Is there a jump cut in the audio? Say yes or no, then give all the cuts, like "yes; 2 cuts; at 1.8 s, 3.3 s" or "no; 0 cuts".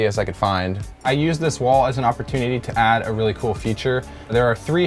yes; 1 cut; at 1.0 s